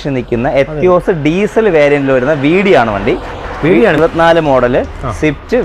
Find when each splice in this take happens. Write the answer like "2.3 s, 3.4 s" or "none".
4.0 s